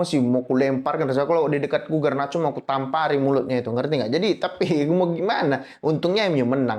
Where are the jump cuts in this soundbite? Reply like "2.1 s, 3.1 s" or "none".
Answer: none